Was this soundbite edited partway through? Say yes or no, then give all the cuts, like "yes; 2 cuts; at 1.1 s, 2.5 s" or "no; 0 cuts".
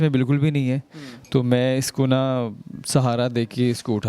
no; 0 cuts